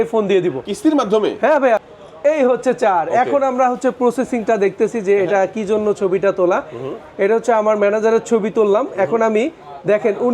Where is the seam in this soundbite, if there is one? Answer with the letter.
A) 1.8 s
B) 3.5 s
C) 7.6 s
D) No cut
A